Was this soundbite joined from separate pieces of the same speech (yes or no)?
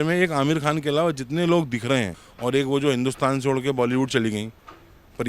yes